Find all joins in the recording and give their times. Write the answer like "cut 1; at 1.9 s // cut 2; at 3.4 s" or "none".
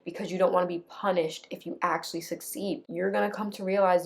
cut 1; at 2.8 s